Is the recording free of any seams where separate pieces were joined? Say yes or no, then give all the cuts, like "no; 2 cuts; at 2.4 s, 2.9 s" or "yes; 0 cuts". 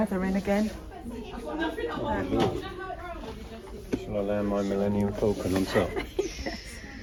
yes; 0 cuts